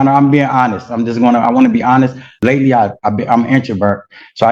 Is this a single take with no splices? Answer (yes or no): no